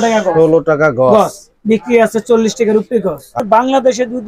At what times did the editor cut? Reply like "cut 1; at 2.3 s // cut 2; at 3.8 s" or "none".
cut 1; at 3.3 s